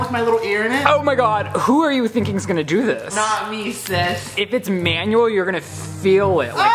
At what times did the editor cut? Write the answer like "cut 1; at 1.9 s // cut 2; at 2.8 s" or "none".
cut 1; at 3.1 s // cut 2; at 4.3 s